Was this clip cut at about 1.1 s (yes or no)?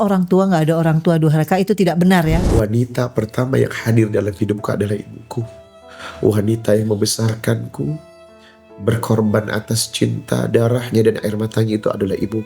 no